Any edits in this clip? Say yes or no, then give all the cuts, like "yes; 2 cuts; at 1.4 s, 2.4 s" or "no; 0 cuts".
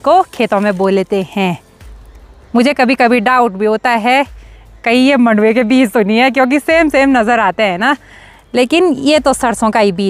no; 0 cuts